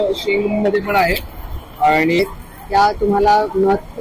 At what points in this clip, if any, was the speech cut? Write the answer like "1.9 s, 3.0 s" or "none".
2.2 s